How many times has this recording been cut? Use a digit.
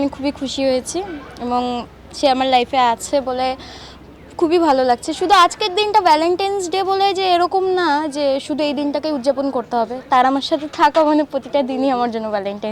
0